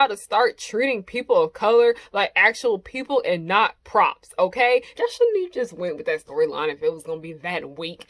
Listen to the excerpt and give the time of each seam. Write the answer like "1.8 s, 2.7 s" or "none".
4.9 s